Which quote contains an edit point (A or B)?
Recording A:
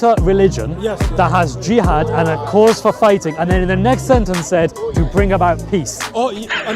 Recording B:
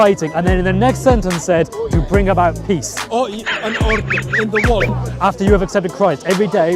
B